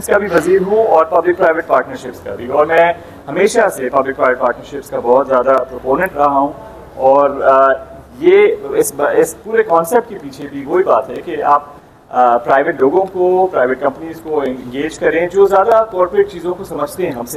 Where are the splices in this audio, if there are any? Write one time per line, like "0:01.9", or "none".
none